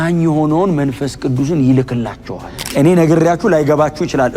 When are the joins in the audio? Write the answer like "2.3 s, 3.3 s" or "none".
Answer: 2.5 s